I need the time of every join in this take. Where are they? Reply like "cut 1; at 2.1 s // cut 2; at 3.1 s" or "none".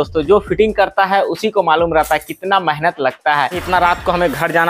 cut 1; at 3.6 s